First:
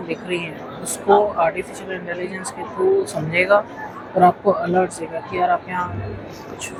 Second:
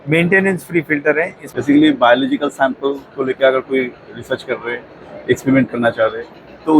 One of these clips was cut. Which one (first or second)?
second